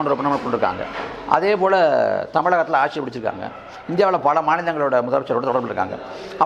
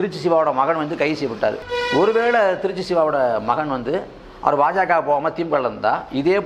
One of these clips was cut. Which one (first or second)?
second